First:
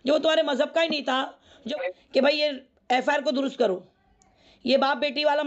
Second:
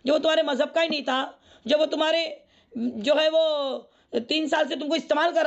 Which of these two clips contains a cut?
first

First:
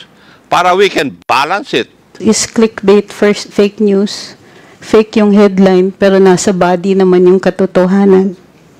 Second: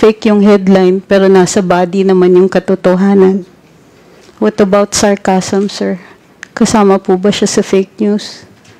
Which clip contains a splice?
first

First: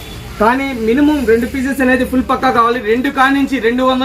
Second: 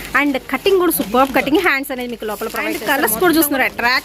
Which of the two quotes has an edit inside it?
second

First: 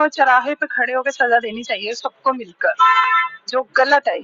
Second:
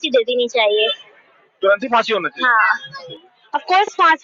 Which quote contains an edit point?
second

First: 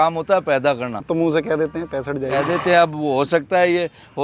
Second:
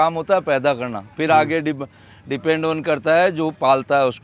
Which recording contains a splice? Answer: first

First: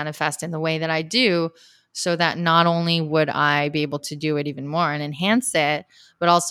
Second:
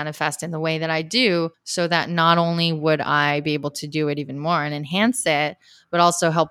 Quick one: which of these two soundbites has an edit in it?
second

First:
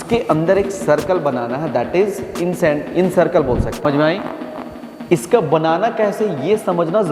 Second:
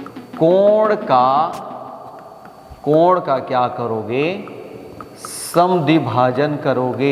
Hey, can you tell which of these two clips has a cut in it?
first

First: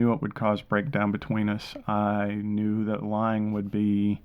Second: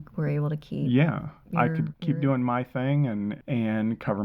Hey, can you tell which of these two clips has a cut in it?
second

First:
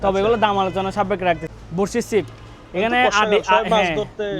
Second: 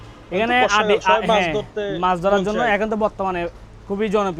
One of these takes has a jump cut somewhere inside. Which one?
first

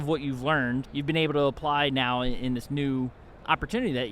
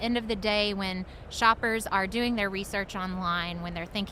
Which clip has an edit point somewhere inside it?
first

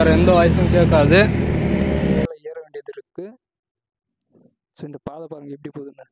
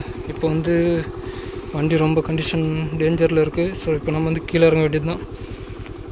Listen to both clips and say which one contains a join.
first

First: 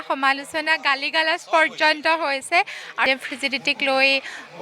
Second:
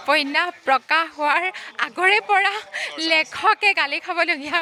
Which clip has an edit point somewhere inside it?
first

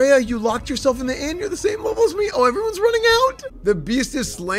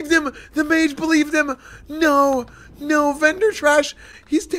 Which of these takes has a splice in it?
first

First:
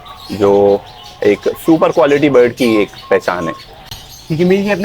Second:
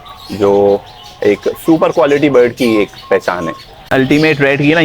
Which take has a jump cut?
second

